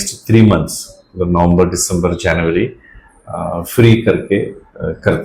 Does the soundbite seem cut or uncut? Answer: uncut